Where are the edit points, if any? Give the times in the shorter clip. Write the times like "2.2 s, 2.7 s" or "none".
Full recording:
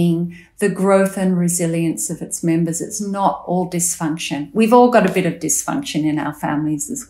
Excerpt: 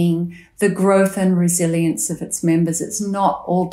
none